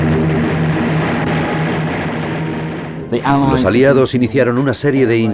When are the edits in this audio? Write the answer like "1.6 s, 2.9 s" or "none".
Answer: 1.2 s